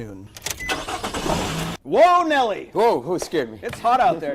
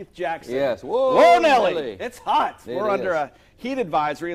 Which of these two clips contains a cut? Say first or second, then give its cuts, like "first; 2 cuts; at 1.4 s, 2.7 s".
first; 1 cut; at 1.8 s